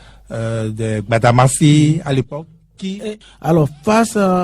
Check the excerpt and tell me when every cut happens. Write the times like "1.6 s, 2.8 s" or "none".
2.9 s